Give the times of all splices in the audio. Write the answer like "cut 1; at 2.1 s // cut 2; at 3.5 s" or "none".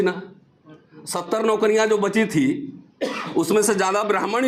none